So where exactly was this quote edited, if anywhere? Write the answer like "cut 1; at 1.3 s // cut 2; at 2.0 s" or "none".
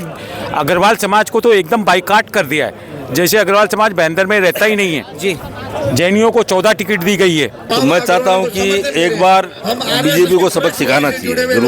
cut 1; at 7.6 s